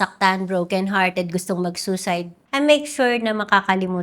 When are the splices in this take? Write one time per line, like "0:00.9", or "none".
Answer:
0:02.4